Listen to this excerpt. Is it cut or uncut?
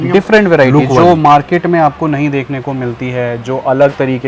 uncut